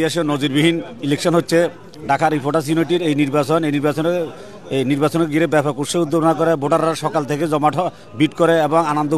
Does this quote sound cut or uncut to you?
uncut